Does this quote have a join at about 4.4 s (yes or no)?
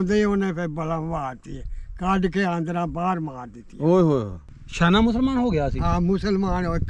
yes